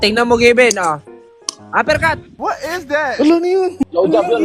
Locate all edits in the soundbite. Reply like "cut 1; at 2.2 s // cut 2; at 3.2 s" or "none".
none